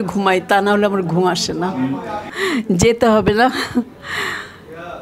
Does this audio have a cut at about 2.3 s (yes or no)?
yes